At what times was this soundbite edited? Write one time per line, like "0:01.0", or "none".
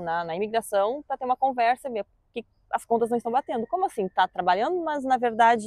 none